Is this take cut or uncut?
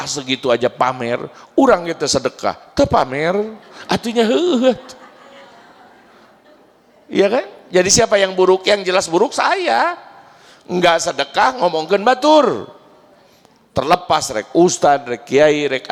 uncut